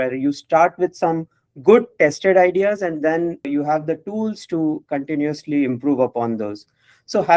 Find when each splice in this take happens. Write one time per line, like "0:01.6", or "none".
0:03.5